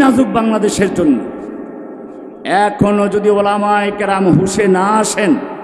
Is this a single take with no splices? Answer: yes; 0 cuts

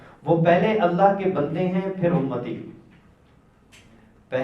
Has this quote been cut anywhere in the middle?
no; 0 cuts

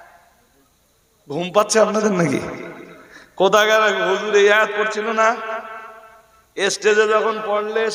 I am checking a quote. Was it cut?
no; 0 cuts

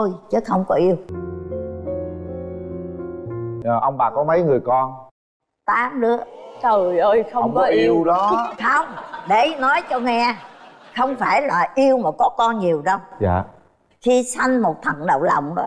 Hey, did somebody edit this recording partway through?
no; 0 cuts

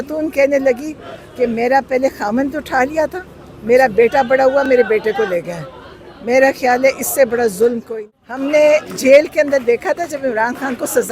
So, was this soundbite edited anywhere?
yes; 1 cut; at 7.9 s

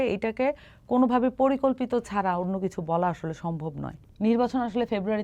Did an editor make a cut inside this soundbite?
yes; 1 cut; at 3.9 s

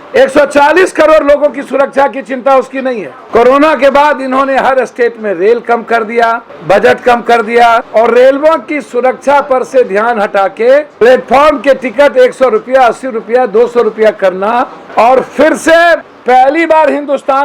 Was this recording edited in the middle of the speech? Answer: yes; 6 cuts; at 3.1 s, 6.5 s, 7.9 s, 10.9 s, 14.8 s, 16.1 s

